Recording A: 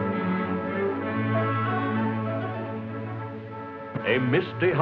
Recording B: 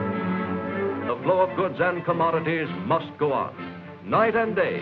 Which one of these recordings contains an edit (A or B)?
A